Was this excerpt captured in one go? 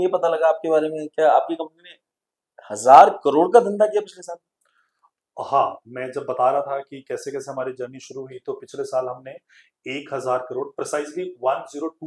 yes; 0 cuts

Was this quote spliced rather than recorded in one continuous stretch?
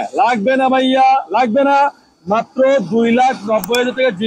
no; 0 cuts

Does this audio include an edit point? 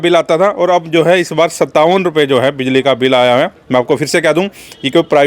no; 0 cuts

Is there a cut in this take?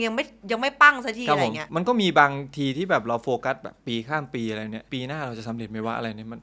yes; 2 cuts; at 1.6 s, 4.9 s

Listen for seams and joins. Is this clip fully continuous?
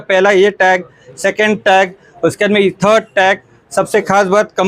yes; 0 cuts

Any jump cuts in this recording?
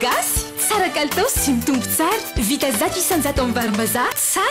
no; 0 cuts

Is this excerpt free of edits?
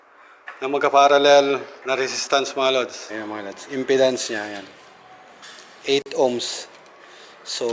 no; 2 cuts; at 1.7 s, 3.0 s

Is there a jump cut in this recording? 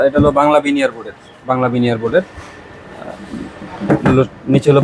no; 0 cuts

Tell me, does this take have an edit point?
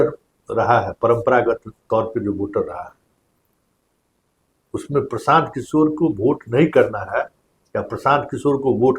no; 0 cuts

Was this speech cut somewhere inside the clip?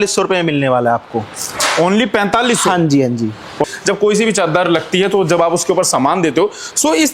yes; 1 cut; at 3.6 s

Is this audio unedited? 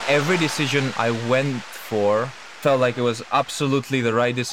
no; 1 cut; at 2.4 s

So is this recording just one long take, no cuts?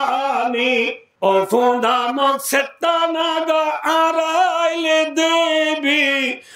no; 1 cut; at 1.0 s

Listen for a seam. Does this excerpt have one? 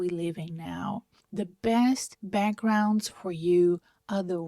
yes; 1 cut; at 1.2 s

